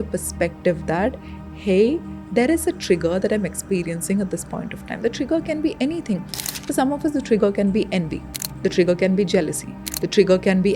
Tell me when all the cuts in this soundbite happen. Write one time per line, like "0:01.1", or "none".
none